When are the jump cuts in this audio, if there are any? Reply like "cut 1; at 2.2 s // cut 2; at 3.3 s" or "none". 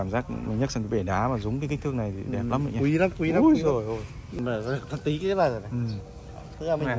cut 1; at 4.4 s